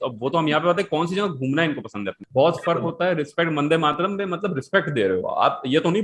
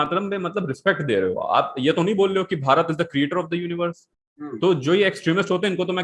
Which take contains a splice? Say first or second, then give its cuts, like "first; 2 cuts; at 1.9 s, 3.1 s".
first; 1 cut; at 2.2 s